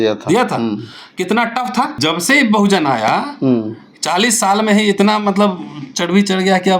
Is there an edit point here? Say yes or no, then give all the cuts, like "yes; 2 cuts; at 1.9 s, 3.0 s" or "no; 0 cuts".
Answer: yes; 1 cut; at 2.0 s